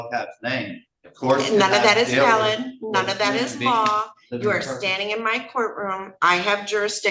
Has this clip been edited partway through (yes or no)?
no